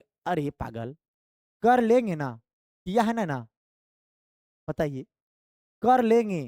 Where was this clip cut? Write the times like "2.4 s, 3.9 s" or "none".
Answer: none